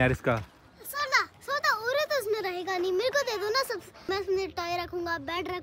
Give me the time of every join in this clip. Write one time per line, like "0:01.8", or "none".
none